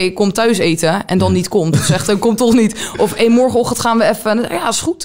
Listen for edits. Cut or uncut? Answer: uncut